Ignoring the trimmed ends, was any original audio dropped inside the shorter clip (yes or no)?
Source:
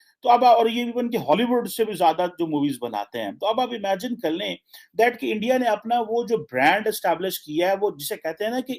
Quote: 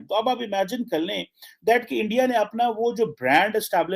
no